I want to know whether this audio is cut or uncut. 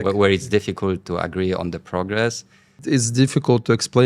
cut